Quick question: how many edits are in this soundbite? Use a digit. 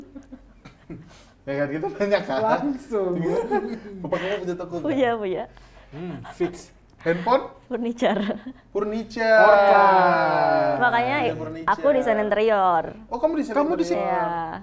1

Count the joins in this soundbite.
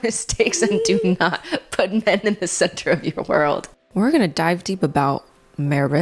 1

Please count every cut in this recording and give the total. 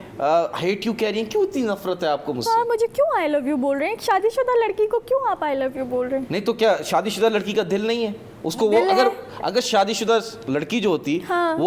0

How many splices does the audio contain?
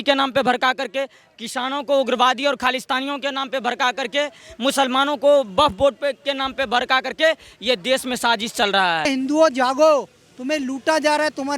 1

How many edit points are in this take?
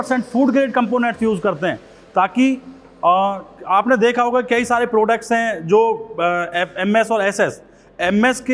0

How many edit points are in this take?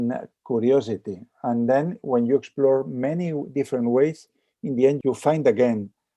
1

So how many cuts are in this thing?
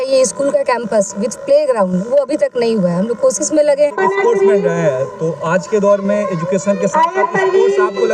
1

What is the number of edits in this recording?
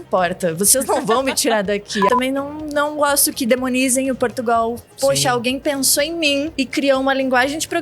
2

